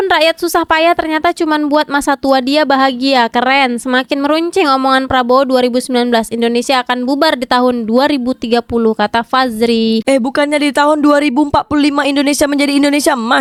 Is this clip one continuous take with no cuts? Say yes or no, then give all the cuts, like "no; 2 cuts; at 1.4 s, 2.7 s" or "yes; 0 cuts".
yes; 0 cuts